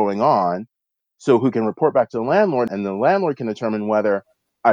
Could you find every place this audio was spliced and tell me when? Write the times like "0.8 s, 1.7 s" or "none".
2.7 s